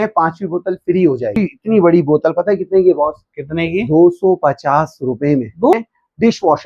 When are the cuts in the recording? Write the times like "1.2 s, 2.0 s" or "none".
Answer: 1.4 s, 5.7 s